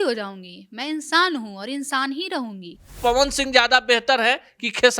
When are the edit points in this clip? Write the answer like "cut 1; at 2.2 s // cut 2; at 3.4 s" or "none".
cut 1; at 3.0 s